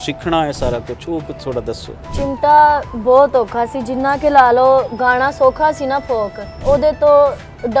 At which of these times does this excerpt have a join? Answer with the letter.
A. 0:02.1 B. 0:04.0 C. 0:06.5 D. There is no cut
C